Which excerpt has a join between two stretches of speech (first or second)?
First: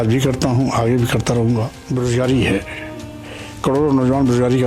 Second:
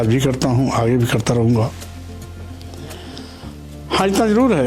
first